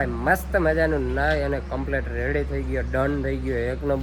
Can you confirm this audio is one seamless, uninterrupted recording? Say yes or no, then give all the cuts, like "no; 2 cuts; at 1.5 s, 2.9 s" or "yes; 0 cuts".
yes; 0 cuts